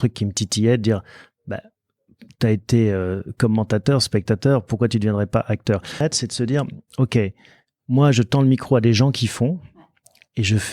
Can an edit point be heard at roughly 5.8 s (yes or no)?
yes